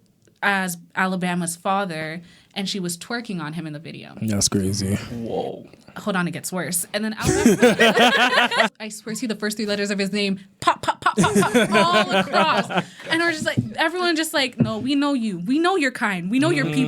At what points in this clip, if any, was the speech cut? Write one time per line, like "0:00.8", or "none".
0:08.7